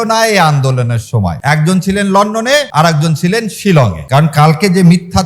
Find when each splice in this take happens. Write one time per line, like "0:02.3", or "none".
0:01.4
0:02.7
0:04.0